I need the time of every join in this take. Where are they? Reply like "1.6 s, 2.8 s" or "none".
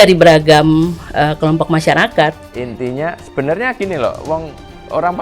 2.5 s